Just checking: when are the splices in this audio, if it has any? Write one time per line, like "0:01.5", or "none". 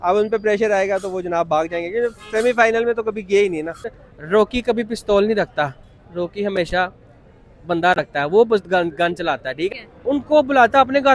0:03.9
0:09.7